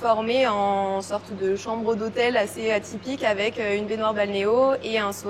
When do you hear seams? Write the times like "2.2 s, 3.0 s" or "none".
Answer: none